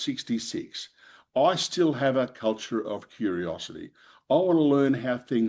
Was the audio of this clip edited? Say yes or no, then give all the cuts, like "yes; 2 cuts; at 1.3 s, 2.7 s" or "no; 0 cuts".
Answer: no; 0 cuts